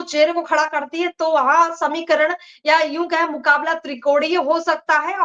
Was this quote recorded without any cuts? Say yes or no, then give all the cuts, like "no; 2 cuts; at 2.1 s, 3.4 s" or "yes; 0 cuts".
yes; 0 cuts